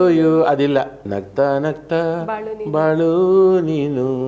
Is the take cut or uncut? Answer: cut